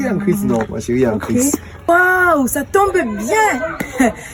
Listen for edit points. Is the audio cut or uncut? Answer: cut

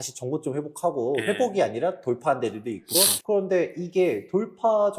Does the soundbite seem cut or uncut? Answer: cut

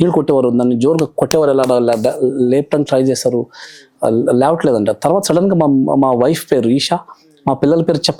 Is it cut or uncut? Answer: uncut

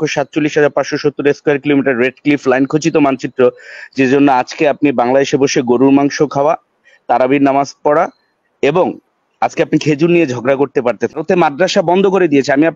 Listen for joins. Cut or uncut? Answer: cut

